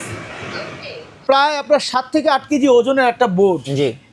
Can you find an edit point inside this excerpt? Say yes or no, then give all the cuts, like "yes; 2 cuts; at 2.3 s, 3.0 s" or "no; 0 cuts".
yes; 1 cut; at 1.2 s